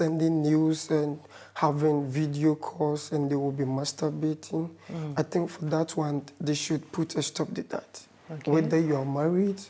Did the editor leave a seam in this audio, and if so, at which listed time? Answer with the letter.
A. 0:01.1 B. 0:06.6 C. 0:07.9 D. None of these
D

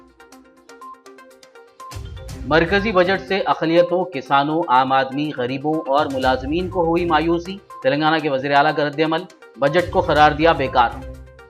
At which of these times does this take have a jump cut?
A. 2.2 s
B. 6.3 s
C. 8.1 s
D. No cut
A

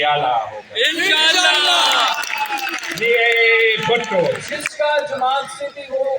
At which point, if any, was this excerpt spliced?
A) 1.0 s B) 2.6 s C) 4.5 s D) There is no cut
C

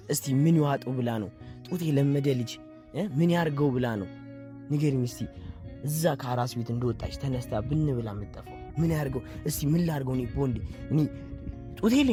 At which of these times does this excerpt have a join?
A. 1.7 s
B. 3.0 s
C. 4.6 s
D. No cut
D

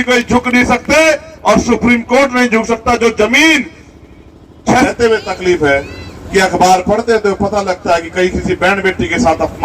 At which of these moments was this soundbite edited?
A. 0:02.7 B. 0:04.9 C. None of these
B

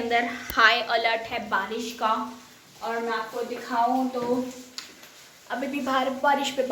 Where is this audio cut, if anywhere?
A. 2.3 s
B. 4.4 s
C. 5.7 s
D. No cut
D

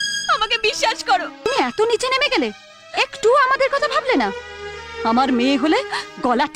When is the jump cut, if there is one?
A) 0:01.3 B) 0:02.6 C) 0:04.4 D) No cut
A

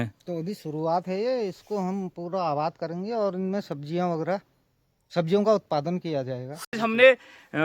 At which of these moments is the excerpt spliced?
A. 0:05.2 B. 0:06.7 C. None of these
B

